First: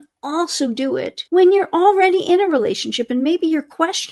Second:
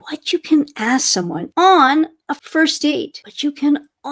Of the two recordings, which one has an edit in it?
second; 2 cuts; at 1.4 s, 2.7 s

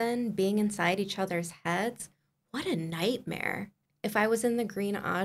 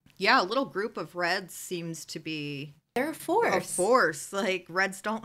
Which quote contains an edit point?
first; 1 cut; at 3.8 s

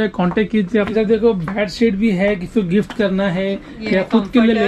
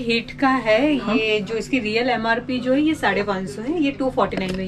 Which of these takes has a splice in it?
first; 1 cut; at 0.9 s

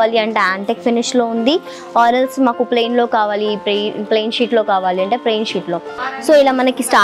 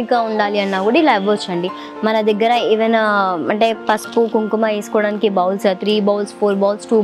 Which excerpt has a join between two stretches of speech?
first; 1 cut; at 6.0 s

